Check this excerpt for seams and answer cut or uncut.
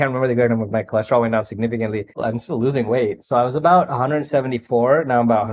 cut